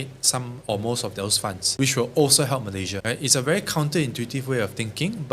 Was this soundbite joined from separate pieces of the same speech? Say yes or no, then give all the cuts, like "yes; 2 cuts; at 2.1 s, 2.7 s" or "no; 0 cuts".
yes; 2 cuts; at 1.6 s, 3.0 s